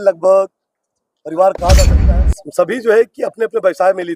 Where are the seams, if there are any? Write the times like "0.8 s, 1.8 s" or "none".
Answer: 2.0 s